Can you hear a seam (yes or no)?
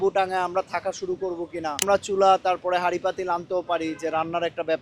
yes